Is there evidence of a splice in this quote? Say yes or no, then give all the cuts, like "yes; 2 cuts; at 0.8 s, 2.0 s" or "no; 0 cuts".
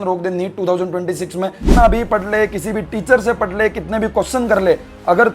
yes; 1 cut; at 1.6 s